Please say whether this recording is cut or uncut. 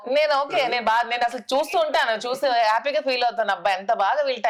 uncut